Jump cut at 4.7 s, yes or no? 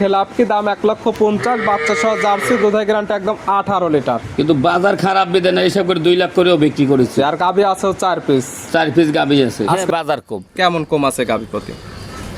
no